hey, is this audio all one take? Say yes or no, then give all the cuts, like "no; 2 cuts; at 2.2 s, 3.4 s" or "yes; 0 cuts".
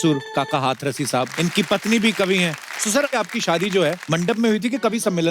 no; 3 cuts; at 1.3 s, 3.1 s, 4.0 s